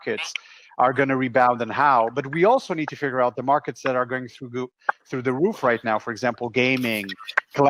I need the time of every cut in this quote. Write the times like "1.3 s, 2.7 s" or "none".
none